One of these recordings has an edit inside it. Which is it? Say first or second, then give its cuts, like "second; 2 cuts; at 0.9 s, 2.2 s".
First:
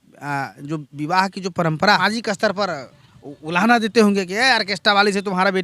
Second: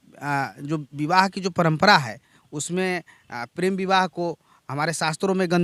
first; 1 cut; at 2.0 s